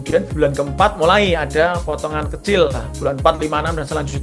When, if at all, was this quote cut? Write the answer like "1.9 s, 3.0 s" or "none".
none